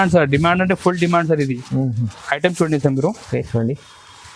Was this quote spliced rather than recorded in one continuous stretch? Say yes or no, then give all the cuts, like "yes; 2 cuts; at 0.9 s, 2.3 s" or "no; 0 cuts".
no; 0 cuts